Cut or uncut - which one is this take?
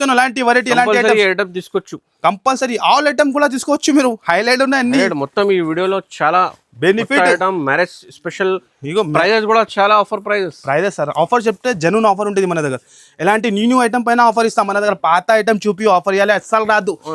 uncut